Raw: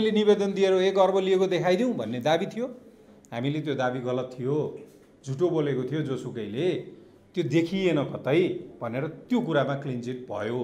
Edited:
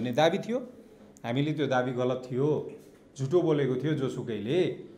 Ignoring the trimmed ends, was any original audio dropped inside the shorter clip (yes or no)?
no